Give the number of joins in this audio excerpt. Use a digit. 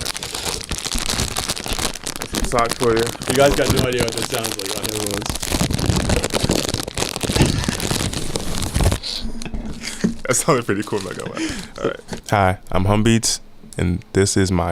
1